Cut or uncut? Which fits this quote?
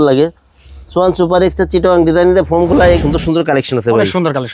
cut